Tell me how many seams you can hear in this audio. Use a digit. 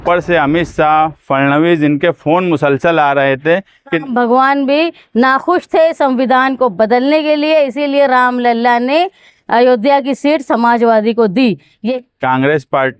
2